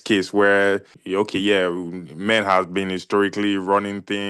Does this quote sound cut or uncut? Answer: cut